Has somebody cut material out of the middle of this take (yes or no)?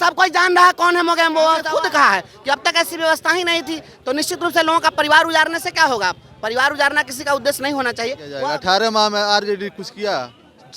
yes